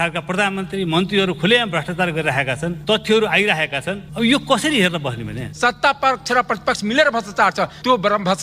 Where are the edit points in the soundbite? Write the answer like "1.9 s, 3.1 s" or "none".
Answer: 2.8 s, 4.0 s, 5.4 s

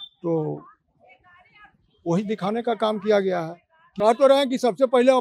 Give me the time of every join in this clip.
3.8 s

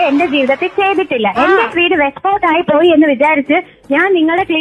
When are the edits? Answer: none

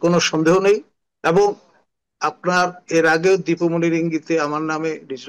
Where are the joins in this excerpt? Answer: none

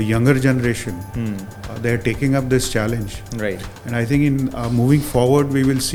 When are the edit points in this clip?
none

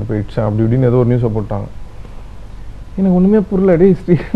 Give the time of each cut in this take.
none

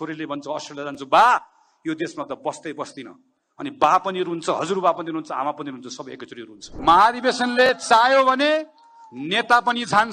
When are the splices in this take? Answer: 6.6 s

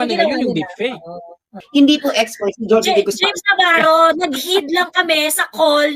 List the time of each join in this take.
1.5 s

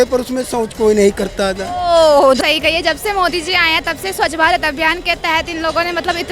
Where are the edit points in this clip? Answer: 2.4 s

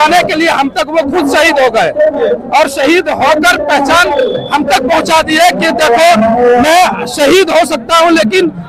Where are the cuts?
none

